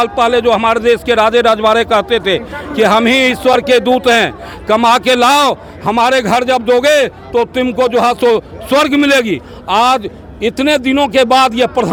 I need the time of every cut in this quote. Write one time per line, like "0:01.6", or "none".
none